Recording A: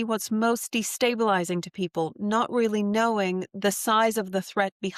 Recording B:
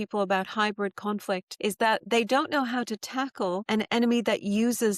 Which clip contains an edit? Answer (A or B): B